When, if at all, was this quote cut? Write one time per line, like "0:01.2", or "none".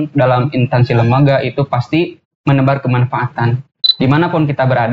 0:03.8

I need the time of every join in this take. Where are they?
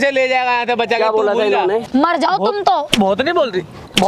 0:01.9

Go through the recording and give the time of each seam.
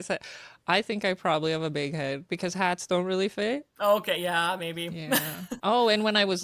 0:03.7
0:05.4

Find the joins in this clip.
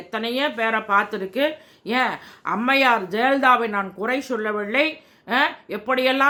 none

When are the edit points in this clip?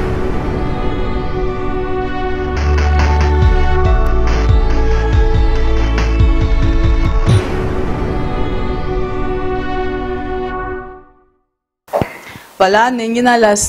0:02.5

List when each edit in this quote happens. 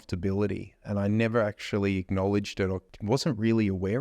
0:02.9

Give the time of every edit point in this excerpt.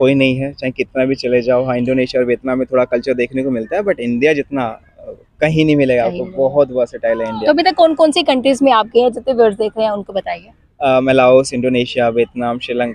none

